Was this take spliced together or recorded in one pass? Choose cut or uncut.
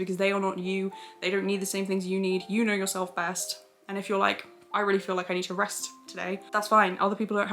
cut